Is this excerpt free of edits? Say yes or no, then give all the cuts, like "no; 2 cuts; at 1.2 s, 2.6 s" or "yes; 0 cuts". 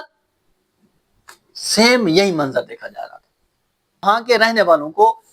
no; 1 cut; at 4.0 s